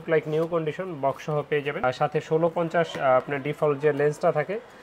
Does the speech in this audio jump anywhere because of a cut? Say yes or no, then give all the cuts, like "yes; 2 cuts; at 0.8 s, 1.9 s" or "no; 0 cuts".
no; 0 cuts